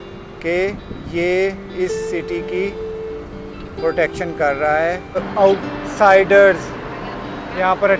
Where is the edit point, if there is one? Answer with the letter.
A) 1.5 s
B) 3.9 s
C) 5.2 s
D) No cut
C